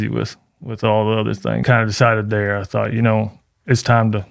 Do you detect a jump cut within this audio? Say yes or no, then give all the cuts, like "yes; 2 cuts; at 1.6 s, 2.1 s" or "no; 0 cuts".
yes; 1 cut; at 1.6 s